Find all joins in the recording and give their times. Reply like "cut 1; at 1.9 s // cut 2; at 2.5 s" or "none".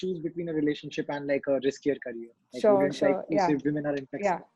none